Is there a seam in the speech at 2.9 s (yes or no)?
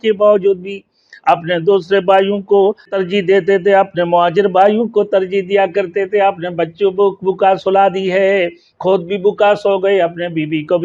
yes